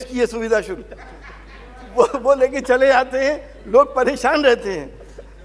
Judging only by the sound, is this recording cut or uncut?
uncut